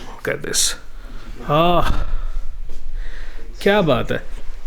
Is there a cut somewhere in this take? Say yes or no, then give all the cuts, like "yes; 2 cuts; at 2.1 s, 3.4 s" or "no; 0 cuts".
yes; 1 cut; at 1.3 s